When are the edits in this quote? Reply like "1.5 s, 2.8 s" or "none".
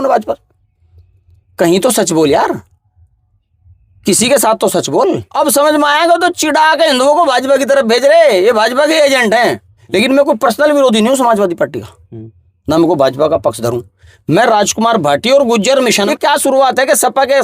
5.3 s, 9.7 s, 16.0 s